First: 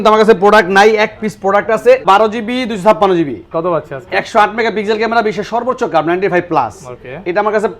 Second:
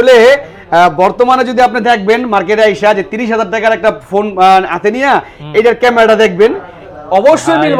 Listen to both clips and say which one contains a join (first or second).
first